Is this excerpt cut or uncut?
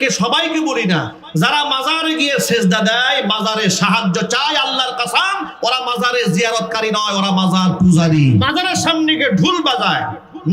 cut